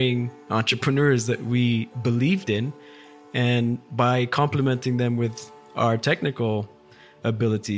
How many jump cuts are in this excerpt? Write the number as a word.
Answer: zero